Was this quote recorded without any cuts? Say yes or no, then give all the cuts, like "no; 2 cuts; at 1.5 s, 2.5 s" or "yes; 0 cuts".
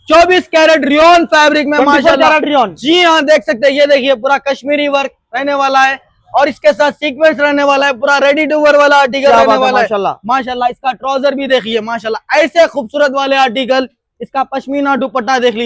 yes; 0 cuts